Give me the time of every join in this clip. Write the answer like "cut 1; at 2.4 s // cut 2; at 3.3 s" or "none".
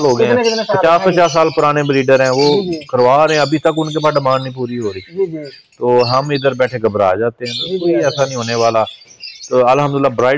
none